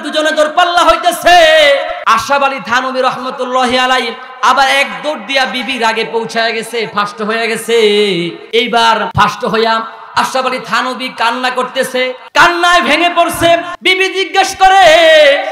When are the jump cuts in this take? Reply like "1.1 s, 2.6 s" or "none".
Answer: 2.0 s, 8.4 s, 9.1 s, 12.2 s, 13.7 s